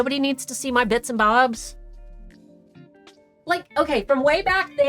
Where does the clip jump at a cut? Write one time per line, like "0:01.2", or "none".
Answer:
none